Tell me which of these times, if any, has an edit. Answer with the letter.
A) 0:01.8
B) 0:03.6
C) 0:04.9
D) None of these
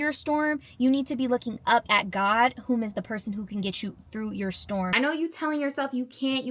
C